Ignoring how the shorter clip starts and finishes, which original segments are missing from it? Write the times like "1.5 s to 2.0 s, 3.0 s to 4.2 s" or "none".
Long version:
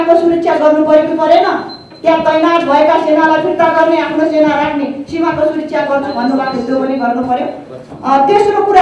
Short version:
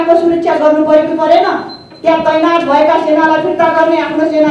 none